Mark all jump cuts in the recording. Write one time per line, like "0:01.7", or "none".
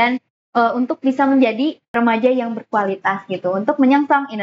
0:01.9

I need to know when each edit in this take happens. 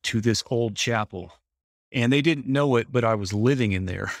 none

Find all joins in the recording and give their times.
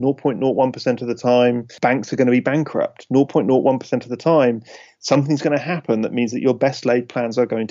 0:01.7

